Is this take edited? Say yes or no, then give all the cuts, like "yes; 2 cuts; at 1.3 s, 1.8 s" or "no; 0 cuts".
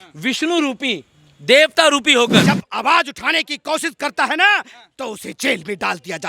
yes; 1 cut; at 2.4 s